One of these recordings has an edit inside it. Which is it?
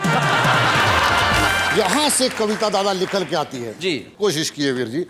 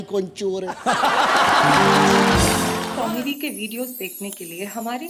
second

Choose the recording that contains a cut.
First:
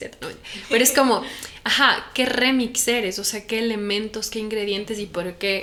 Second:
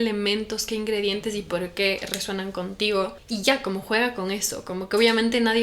second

